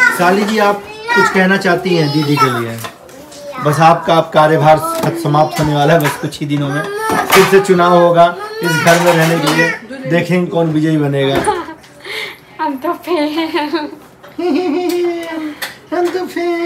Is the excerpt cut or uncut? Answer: uncut